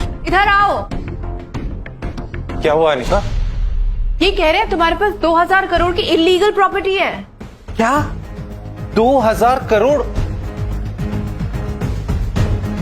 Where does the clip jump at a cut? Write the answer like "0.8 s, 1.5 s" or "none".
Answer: none